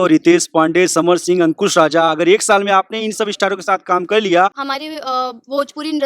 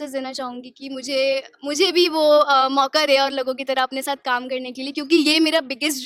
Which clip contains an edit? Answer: first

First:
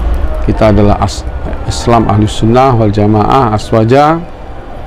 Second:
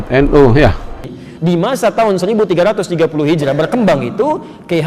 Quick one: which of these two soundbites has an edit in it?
second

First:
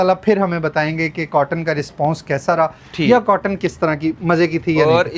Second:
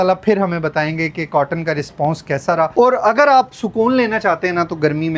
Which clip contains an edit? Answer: second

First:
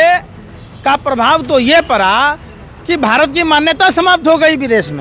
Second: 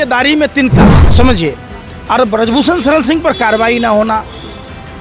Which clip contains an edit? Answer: second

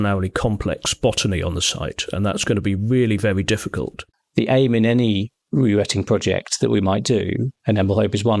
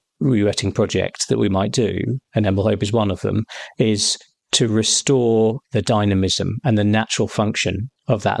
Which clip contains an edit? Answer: first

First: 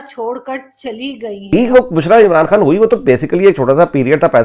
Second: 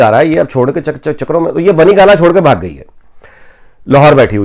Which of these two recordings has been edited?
first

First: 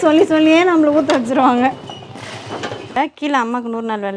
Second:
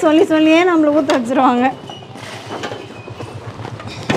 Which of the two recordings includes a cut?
first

